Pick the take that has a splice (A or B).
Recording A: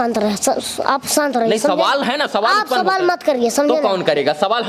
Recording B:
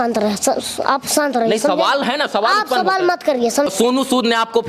B